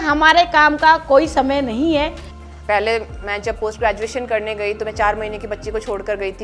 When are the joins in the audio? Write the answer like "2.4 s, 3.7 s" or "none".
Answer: 2.3 s